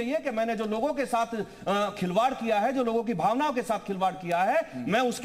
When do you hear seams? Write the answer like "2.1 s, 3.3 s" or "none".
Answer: none